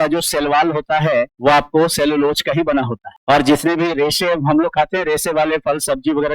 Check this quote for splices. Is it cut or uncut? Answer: cut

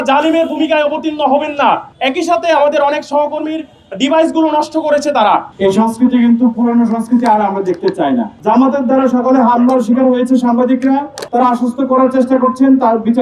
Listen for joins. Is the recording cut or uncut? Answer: cut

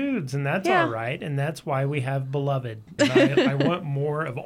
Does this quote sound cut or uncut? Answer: cut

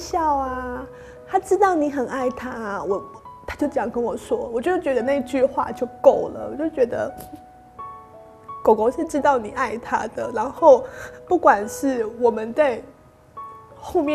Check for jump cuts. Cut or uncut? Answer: uncut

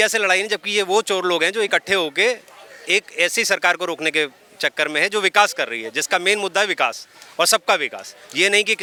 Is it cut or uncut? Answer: uncut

